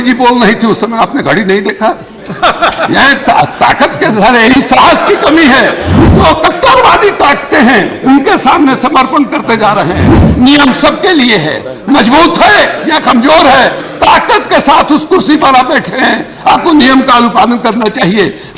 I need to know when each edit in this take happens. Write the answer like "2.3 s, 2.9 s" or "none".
5.9 s, 10.2 s